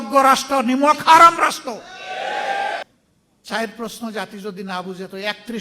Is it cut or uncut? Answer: cut